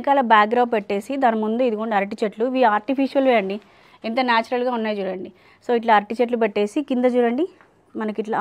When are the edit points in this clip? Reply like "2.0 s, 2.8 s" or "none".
none